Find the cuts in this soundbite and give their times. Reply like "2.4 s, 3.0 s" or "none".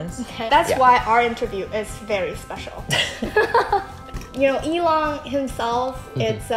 4.0 s